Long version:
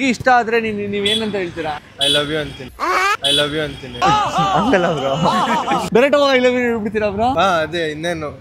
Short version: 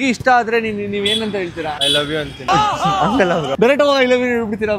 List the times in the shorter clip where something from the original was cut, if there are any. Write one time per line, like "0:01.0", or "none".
0:02.1
0:03.5